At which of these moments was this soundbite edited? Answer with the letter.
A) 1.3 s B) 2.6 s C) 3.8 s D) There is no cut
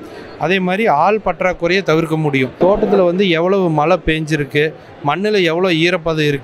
B